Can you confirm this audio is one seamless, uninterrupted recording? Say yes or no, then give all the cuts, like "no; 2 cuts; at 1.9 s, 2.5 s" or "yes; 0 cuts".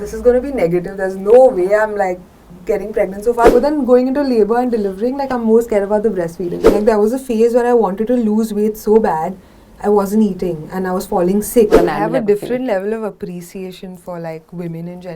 no; 3 cuts; at 3.5 s, 6.6 s, 11.8 s